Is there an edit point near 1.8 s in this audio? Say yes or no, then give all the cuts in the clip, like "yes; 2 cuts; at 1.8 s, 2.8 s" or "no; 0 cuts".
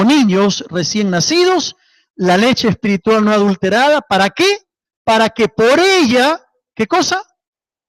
no; 1 cut; at 6.5 s